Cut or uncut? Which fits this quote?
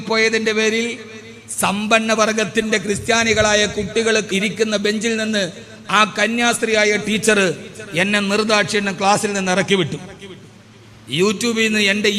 cut